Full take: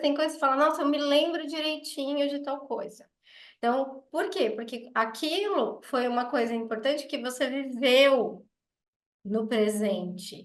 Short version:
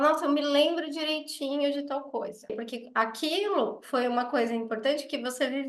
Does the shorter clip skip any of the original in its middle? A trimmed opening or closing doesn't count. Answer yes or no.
yes